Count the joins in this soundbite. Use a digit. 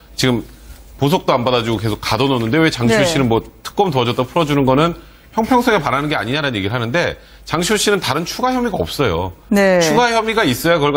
1